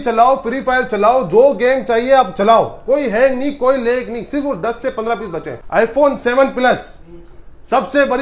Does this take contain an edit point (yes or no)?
yes